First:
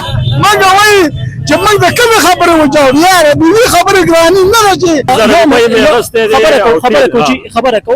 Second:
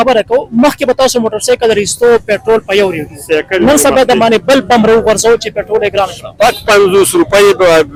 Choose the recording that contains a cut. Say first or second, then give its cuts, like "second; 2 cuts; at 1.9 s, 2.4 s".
first; 1 cut; at 5.0 s